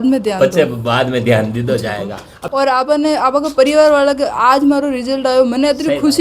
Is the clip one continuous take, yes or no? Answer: no